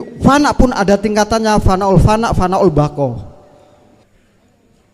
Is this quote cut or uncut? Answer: cut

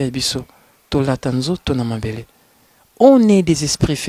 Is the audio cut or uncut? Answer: uncut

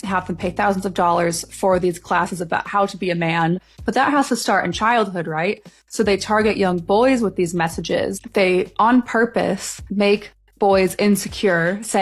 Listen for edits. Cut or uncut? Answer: cut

